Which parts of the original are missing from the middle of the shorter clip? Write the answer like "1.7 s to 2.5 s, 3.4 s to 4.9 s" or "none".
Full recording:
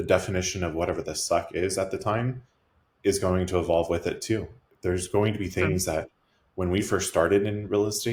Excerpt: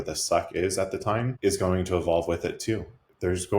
2.3 s to 2.9 s

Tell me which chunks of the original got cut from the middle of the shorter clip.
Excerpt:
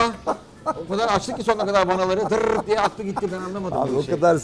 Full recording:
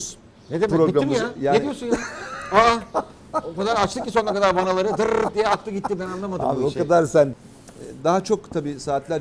none

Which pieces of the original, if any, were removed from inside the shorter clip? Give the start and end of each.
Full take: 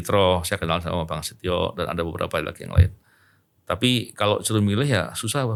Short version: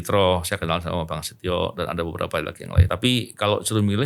2.9 s to 3.6 s

